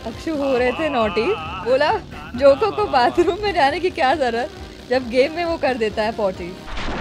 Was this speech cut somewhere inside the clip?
yes; 1 cut; at 1.5 s

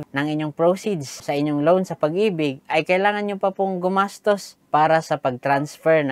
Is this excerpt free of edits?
yes; 0 cuts

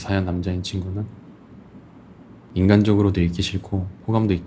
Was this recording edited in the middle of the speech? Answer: yes; 1 cut; at 2.4 s

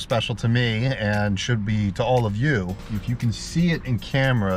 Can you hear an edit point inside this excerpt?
no; 0 cuts

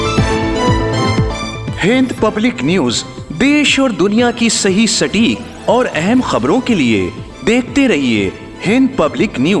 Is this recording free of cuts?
yes; 0 cuts

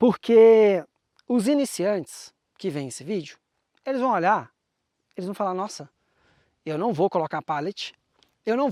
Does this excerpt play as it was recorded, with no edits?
yes; 0 cuts

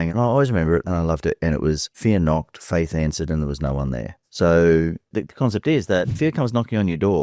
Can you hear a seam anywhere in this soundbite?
yes; 3 cuts; at 1.9 s, 5.1 s, 6.1 s

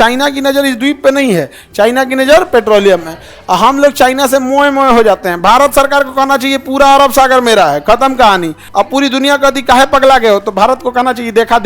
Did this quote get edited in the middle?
yes; 1 cut; at 8.6 s

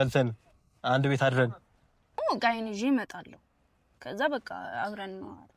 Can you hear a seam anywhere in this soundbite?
yes; 1 cut; at 2.3 s

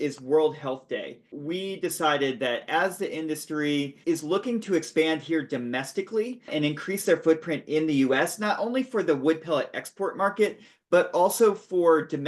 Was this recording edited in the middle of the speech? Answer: yes; 3 cuts; at 1.4 s, 4.0 s, 6.5 s

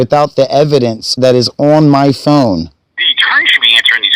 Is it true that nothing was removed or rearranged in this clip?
no; 2 cuts; at 1.0 s, 2.7 s

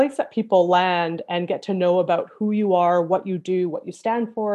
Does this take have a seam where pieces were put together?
no; 0 cuts

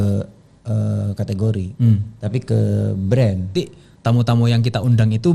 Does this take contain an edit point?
yes; 1 cut; at 3.5 s

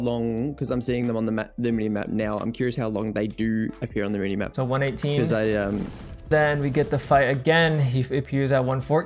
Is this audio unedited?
no; 2 cuts; at 4.5 s, 6.3 s

